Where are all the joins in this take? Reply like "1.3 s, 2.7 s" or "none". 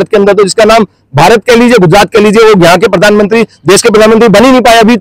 none